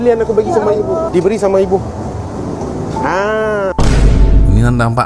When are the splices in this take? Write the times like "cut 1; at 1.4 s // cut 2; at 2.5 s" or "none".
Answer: none